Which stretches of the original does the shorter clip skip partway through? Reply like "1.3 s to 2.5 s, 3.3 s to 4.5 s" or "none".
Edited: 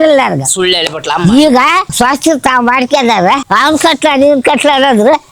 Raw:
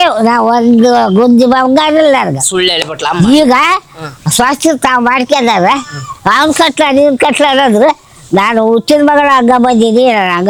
3.8 s to 4.3 s, 5.8 s to 6.2 s